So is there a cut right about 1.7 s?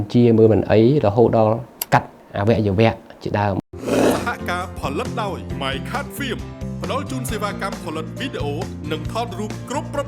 no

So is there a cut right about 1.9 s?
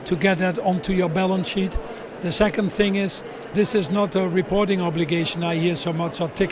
yes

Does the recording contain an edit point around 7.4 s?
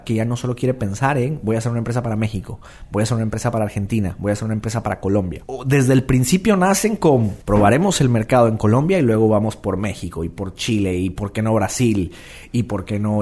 yes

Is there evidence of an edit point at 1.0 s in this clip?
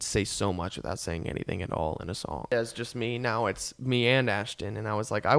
no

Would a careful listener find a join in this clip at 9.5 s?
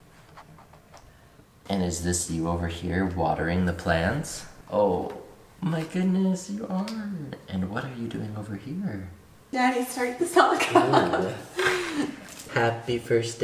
yes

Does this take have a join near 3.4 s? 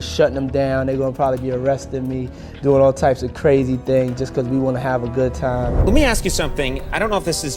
no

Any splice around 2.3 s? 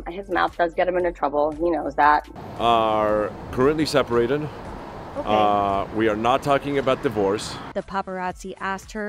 yes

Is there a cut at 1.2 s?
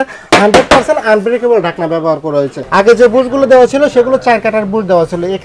no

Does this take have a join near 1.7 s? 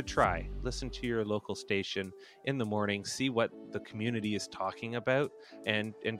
no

